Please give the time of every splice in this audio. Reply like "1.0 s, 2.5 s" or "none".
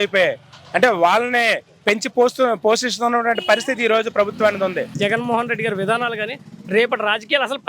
4.9 s